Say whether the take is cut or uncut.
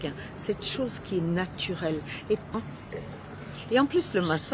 cut